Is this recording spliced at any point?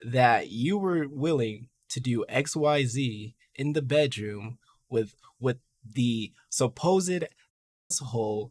no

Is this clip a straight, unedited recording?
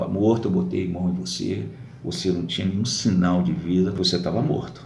no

